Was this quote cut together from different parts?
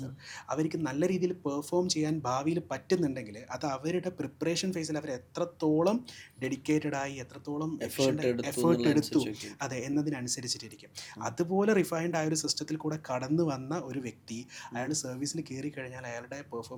no; 0 cuts

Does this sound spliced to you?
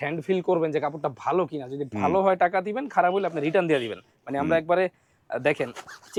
no; 0 cuts

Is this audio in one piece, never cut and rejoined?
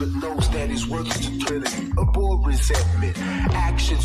no; 1 cut; at 1.5 s

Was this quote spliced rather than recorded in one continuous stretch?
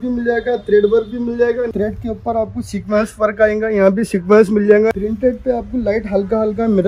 yes; 2 cuts; at 1.7 s, 4.9 s

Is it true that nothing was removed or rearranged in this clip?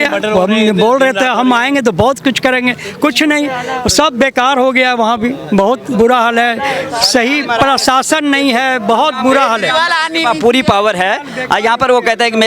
yes; 0 cuts

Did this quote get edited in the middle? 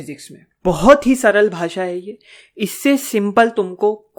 no; 0 cuts

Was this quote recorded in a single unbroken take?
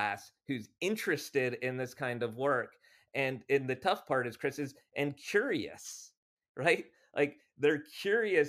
yes; 0 cuts

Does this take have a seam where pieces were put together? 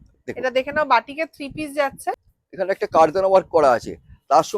yes; 1 cut; at 2.0 s

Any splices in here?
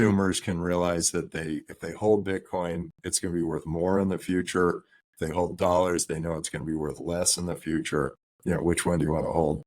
yes; 1 cut; at 8.3 s

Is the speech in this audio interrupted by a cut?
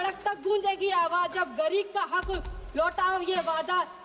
no; 0 cuts

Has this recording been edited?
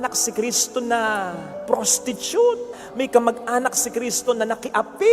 no; 0 cuts

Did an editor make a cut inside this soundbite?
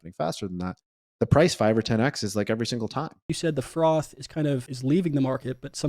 yes; 2 cuts; at 3.3 s, 4.7 s

